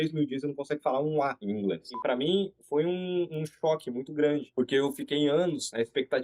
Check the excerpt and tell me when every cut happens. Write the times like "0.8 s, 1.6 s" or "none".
1.9 s